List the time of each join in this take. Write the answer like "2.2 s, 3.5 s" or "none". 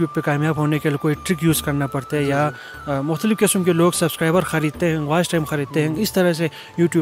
none